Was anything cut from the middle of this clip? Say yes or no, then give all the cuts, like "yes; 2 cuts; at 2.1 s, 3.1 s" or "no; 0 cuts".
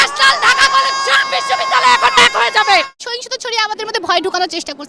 yes; 1 cut; at 3.0 s